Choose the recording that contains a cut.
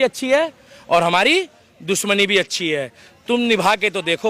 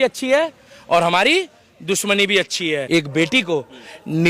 second; 1 cut; at 2.8 s

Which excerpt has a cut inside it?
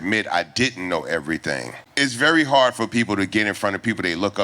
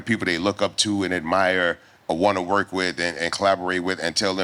first; 1 cut; at 1.8 s

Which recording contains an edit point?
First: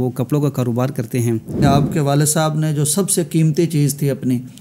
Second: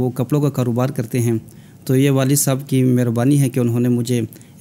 first; 1 cut; at 1.6 s

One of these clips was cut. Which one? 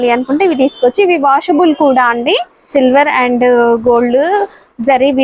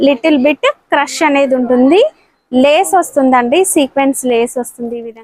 first; 1 cut; at 2.7 s

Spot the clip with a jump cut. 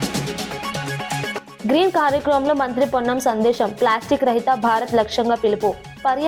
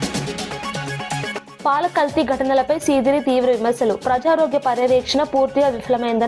second; 1 cut; at 1.5 s

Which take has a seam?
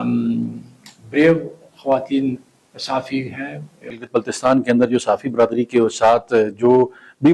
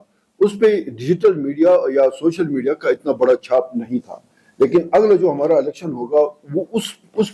first; 1 cut; at 3.9 s

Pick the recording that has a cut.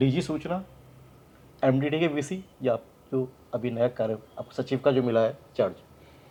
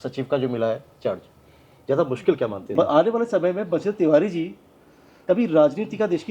second; 1 cut; at 2.7 s

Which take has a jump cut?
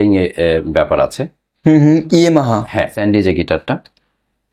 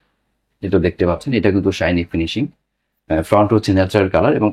first; 1 cut; at 2.9 s

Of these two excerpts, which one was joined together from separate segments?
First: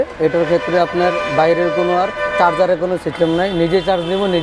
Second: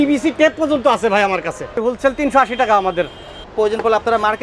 second; 2 cuts; at 1.8 s, 3.5 s

